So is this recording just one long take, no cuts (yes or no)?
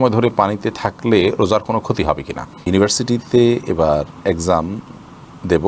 no